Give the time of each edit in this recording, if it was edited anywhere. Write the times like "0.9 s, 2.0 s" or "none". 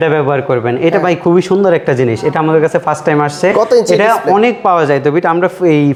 none